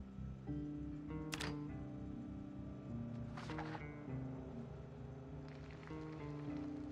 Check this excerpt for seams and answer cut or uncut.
uncut